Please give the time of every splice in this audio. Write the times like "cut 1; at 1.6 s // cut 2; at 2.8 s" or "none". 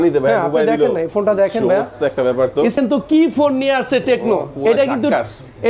cut 1; at 2.8 s